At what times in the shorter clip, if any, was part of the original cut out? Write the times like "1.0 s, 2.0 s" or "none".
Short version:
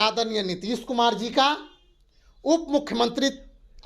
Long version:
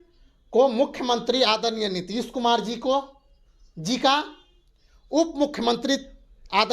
1.3 s